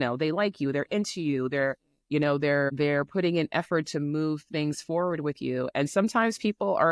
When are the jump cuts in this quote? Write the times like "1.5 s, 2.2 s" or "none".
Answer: 2.7 s